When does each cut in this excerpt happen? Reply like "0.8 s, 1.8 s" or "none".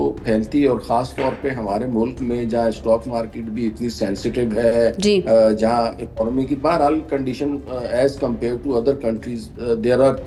none